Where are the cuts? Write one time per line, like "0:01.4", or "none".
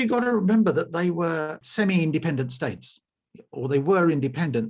0:01.6